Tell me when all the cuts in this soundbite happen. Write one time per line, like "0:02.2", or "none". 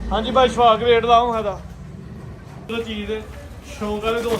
0:02.7